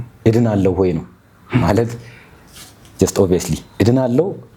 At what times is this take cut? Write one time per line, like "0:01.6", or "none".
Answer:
none